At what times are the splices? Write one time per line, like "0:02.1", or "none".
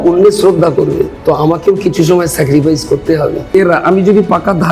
0:01.1
0:03.5